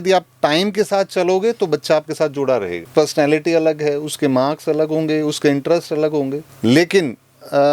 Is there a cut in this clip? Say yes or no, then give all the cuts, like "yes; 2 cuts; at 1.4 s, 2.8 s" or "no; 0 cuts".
yes; 1 cut; at 2.9 s